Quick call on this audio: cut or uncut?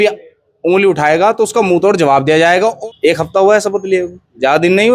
cut